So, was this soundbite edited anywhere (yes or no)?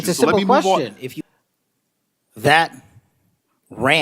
yes